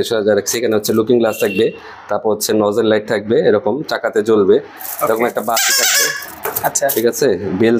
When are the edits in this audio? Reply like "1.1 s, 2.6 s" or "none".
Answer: none